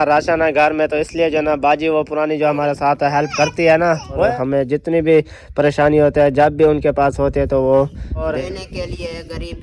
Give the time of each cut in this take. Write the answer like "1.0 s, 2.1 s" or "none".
4.3 s, 8.3 s